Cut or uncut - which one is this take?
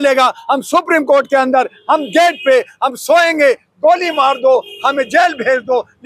uncut